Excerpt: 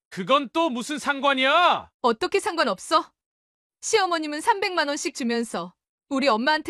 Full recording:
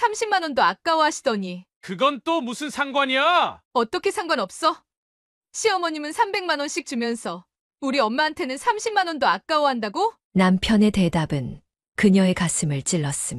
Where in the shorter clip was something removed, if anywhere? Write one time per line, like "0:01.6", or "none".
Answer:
none